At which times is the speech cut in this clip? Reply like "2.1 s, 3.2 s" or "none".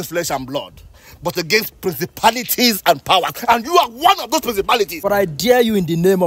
5.0 s